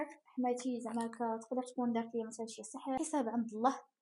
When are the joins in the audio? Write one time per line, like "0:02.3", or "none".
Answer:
0:03.0